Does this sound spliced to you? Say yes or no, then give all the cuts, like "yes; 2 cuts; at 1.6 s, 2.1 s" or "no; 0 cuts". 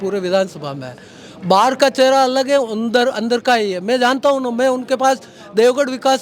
no; 0 cuts